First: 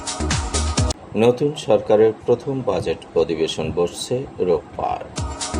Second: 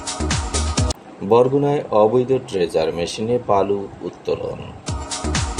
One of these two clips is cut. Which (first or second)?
first